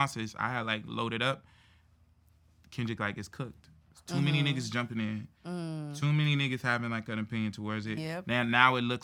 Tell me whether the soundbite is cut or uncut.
uncut